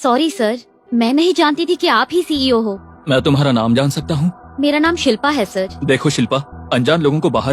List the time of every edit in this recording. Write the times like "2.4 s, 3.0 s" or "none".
none